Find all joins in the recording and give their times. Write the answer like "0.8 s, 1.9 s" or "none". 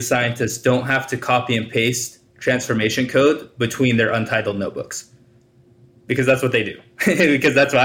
none